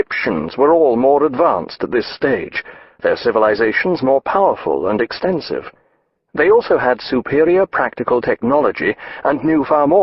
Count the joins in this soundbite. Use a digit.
1